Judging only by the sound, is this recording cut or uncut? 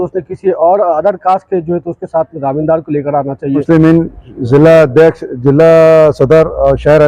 cut